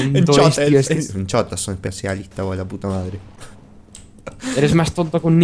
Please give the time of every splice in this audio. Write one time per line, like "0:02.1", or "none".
0:04.0